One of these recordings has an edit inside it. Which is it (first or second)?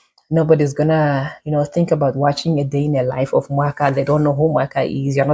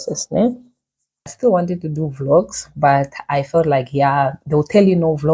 second